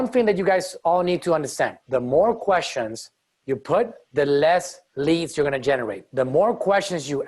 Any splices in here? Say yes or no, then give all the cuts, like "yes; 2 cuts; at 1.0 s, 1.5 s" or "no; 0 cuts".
yes; 4 cuts; at 1.8 s, 4.0 s, 4.8 s, 6.0 s